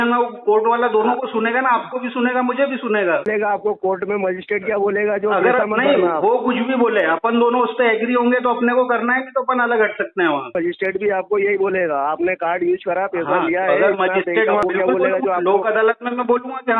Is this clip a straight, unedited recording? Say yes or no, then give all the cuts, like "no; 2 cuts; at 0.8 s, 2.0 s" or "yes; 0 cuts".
no; 3 cuts; at 3.3 s, 10.5 s, 14.6 s